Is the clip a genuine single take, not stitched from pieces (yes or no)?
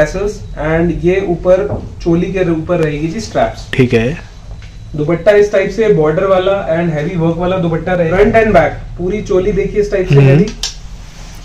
no